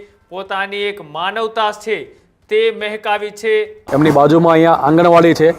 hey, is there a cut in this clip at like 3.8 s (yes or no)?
yes